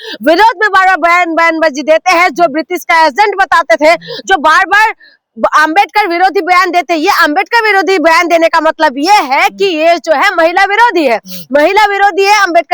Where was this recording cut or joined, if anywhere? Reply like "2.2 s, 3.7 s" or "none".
none